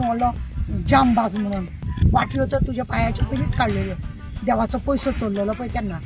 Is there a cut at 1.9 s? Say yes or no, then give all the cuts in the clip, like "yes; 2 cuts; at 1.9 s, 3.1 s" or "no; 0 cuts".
yes; 1 cut; at 1.9 s